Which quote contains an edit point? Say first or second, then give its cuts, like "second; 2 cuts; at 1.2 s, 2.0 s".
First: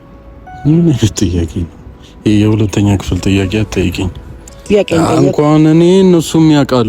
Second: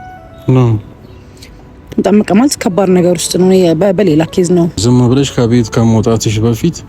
second; 1 cut; at 4.8 s